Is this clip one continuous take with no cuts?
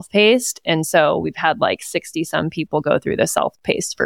yes; 0 cuts

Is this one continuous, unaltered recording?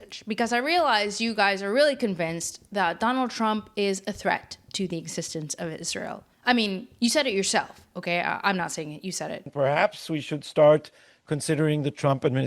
no; 2 cuts; at 6.3 s, 9.5 s

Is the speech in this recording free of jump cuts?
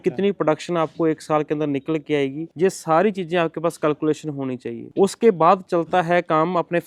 yes; 0 cuts

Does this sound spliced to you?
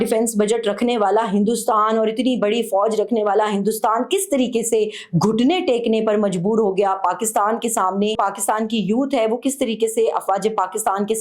yes; 1 cut; at 8.2 s

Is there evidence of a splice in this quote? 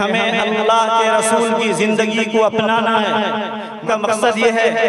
yes; 1 cut; at 3.8 s

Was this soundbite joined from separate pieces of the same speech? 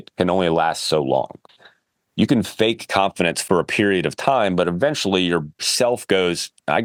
no; 0 cuts

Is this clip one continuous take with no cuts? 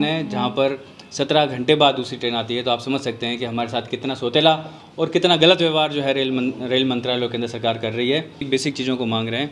no; 1 cut; at 8.4 s

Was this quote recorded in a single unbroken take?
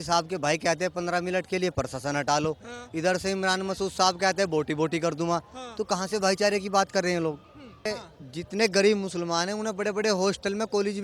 no; 1 cut; at 7.9 s

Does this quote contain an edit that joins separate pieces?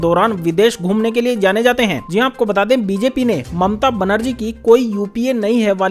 no; 0 cuts

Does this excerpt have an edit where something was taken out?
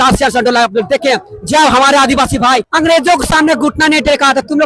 yes; 1 cut; at 2.7 s

